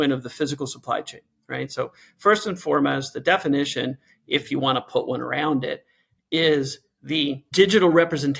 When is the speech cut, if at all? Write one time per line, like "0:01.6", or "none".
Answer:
none